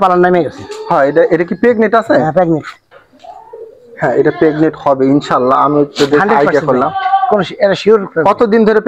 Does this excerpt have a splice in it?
no; 0 cuts

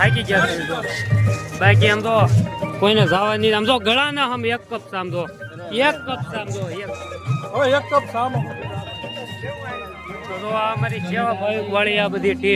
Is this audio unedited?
yes; 0 cuts

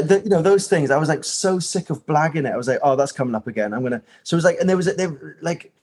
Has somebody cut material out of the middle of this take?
no; 0 cuts

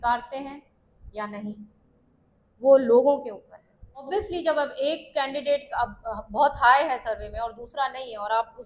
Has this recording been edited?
yes; 1 cut; at 4.1 s

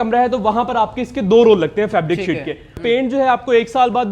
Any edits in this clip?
yes; 1 cut; at 2.8 s

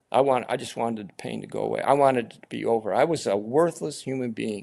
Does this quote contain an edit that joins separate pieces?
no; 0 cuts

